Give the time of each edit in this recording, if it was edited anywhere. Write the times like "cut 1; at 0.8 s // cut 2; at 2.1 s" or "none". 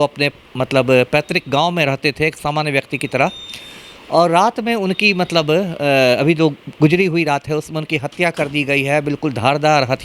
none